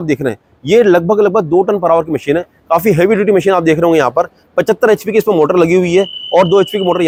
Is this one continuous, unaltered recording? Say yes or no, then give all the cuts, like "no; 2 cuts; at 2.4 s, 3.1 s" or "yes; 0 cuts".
yes; 0 cuts